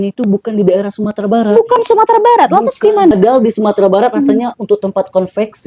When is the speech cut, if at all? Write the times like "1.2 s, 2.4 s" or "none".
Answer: 3.1 s